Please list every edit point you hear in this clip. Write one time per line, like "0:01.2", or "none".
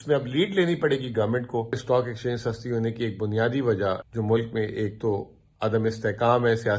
0:01.8
0:04.0